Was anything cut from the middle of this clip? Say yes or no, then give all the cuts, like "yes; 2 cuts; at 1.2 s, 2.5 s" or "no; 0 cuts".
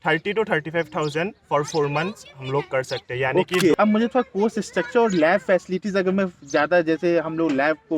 yes; 1 cut; at 3.7 s